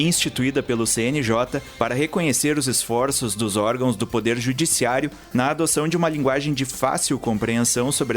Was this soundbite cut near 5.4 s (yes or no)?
no